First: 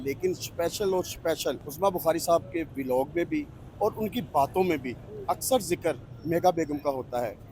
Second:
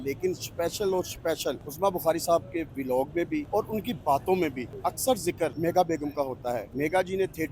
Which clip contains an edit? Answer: second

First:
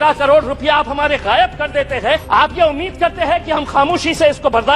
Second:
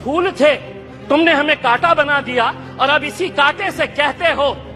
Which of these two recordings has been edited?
first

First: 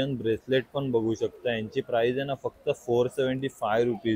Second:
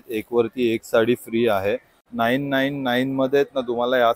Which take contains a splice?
second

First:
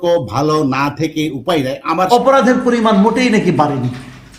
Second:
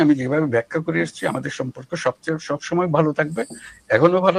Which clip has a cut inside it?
first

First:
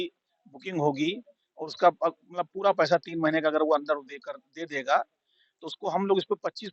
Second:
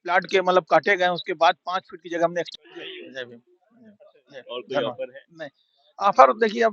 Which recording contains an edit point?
second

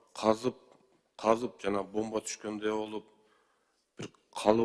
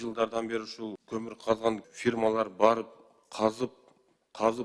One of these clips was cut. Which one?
second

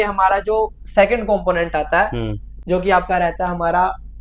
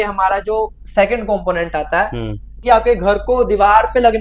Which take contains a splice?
second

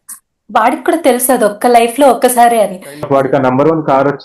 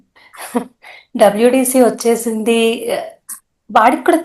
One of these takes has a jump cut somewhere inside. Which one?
first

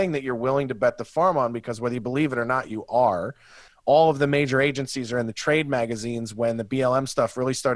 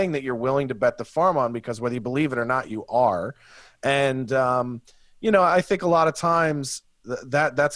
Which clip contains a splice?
first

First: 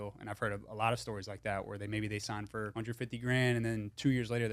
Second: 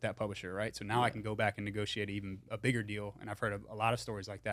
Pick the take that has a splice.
first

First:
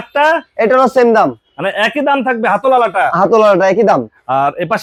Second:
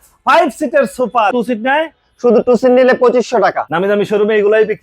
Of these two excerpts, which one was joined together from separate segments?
second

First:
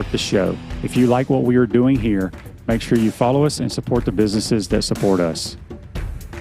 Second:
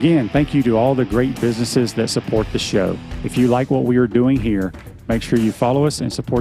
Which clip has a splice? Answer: first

